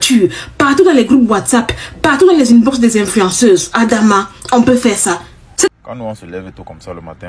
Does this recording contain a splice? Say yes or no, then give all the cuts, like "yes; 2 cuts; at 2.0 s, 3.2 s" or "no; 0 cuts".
yes; 1 cut; at 5.7 s